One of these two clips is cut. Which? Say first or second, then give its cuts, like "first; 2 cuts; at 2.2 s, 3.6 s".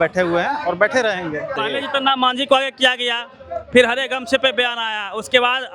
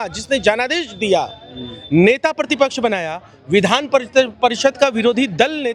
first; 1 cut; at 1.6 s